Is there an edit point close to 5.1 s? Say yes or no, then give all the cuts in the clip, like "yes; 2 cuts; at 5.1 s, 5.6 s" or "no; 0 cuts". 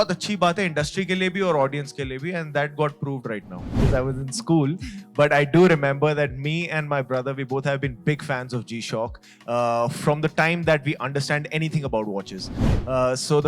no; 1 cut; at 3.8 s